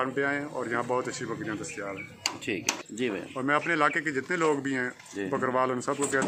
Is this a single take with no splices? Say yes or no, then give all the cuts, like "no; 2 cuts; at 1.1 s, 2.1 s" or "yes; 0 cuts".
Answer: yes; 0 cuts